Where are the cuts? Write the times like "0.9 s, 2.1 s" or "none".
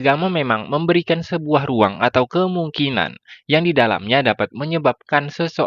none